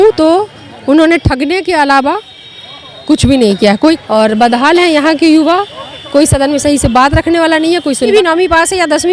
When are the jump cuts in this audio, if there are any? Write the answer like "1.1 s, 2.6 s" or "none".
4.0 s, 8.1 s